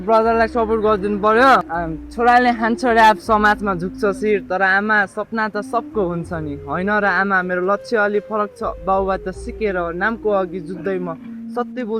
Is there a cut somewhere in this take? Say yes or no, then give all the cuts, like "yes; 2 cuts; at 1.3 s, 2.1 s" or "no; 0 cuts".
yes; 1 cut; at 1.7 s